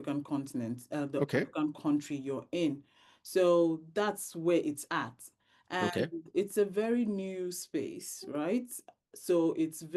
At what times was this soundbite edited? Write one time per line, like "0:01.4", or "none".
none